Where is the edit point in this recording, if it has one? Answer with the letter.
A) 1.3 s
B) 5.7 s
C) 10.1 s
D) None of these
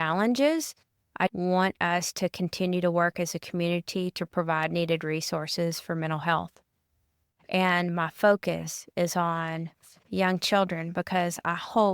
A